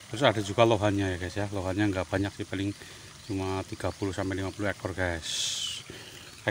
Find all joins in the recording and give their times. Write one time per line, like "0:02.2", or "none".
none